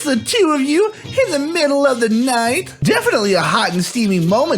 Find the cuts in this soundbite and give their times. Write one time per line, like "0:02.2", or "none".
0:02.7